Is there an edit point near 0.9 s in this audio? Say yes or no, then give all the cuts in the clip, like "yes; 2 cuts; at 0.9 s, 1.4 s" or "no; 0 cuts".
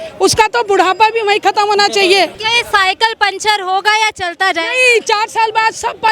no; 1 cut; at 2.5 s